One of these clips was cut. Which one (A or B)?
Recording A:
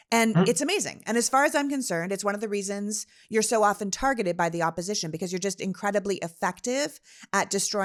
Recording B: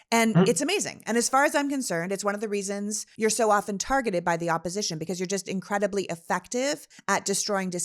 B